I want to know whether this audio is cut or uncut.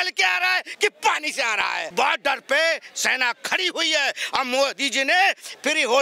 cut